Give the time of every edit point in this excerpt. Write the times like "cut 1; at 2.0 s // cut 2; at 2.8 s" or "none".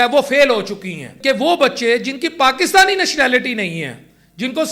cut 1; at 1.1 s